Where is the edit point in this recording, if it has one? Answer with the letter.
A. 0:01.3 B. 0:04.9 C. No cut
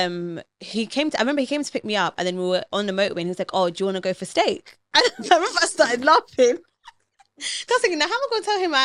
C